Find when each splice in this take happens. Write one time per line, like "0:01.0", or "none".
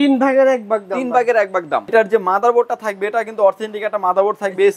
0:01.9